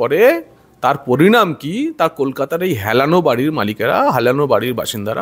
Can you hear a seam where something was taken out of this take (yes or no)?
no